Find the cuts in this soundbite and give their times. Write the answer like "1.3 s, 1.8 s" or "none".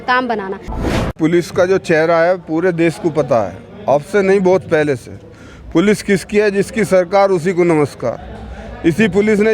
1.1 s